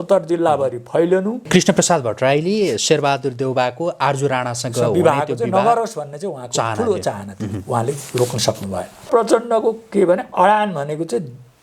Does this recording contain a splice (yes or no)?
yes